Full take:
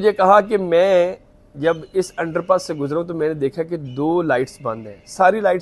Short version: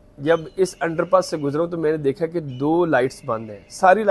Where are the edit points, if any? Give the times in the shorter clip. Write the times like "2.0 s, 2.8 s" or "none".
none